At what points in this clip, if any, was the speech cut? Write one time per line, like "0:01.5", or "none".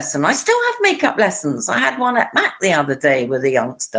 none

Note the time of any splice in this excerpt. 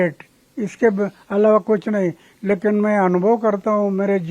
none

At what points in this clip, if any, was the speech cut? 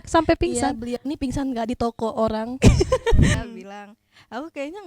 0:03.2

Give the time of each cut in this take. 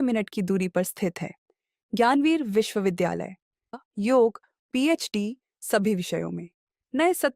0:03.7

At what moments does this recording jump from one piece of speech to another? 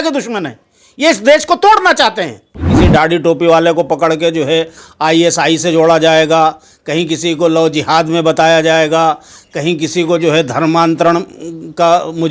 0:02.7

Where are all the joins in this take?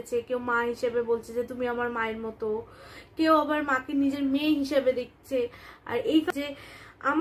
0:06.3

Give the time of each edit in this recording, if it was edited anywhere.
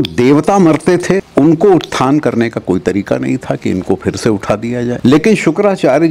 0:01.3
0:05.0

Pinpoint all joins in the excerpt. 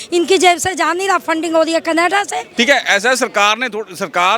0:02.4

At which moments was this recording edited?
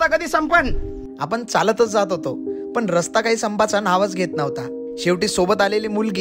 none

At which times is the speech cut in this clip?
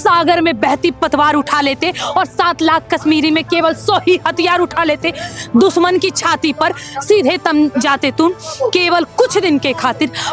none

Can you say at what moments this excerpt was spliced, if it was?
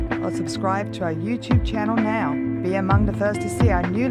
none

